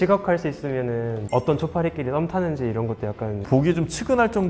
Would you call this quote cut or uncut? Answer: cut